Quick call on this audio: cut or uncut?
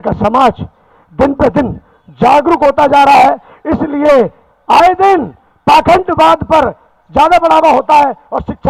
uncut